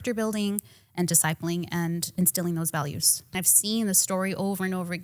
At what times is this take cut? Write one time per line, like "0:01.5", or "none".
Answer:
0:03.4

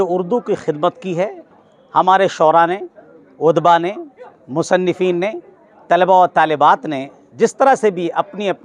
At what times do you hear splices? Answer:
0:01.5

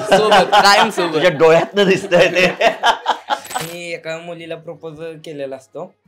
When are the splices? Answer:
0:03.7

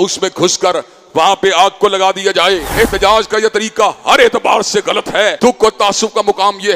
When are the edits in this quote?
0:02.7
0:05.3

